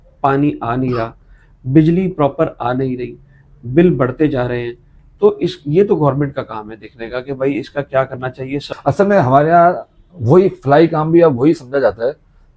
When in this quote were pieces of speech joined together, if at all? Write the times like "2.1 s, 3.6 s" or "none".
8.7 s